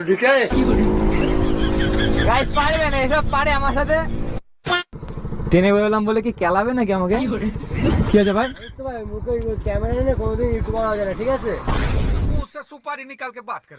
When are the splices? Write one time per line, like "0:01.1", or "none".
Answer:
0:04.6